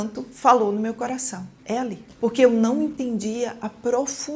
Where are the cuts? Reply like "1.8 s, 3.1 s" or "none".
2.1 s

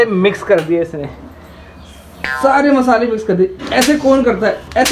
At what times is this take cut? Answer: none

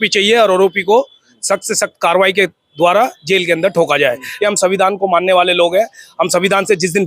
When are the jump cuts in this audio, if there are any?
4.3 s

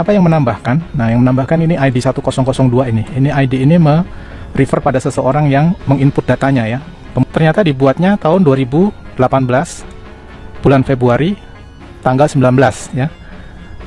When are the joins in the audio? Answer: 7.2 s

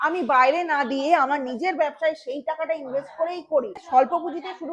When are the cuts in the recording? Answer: 3.7 s

